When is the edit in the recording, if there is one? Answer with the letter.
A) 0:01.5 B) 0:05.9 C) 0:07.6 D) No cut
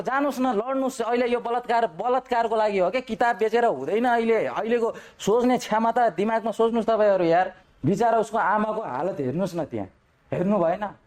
C